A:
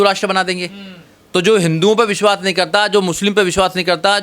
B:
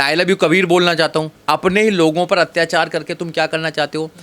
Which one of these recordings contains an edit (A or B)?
B